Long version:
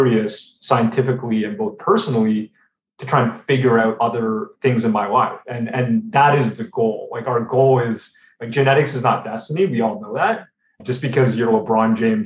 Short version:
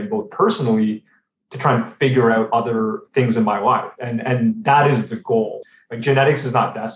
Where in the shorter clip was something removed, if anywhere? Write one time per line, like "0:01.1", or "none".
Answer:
0:05.6